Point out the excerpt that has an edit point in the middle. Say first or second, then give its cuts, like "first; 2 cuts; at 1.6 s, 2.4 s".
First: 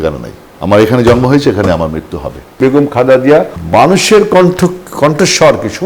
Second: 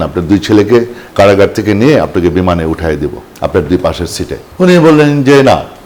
first; 1 cut; at 2.6 s